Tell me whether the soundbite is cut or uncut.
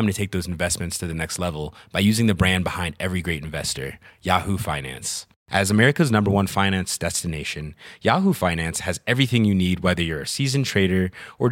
uncut